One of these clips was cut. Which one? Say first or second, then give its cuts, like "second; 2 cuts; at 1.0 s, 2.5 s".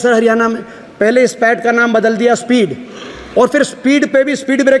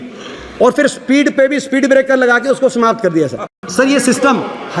second; 1 cut; at 3.6 s